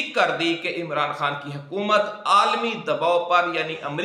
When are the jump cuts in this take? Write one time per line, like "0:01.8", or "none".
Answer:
none